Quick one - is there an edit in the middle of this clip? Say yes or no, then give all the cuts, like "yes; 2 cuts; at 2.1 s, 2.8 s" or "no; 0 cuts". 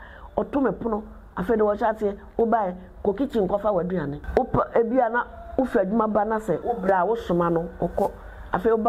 yes; 2 cuts; at 4.2 s, 6.6 s